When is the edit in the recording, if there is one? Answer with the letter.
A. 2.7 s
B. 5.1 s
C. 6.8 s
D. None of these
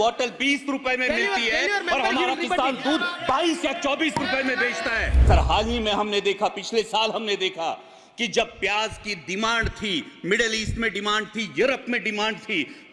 B